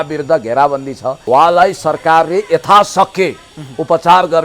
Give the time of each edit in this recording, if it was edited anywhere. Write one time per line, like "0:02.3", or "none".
0:01.2